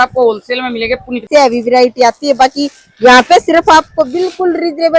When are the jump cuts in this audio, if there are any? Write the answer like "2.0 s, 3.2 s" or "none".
1.2 s